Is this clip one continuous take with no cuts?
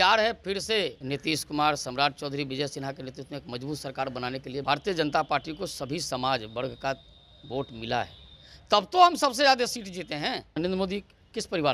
no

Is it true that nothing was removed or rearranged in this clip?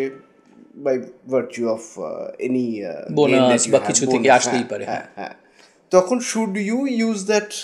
yes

